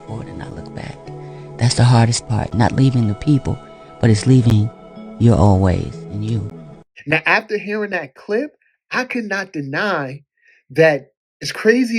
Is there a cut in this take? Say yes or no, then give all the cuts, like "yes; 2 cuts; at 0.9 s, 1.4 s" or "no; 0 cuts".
yes; 1 cut; at 6.9 s